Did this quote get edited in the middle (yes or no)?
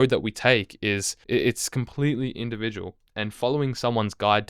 yes